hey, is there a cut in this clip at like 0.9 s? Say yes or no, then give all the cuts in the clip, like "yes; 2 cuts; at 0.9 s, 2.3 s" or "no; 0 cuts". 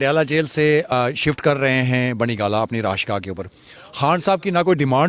yes; 1 cut; at 0.9 s